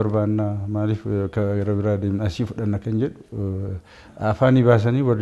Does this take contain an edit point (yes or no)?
no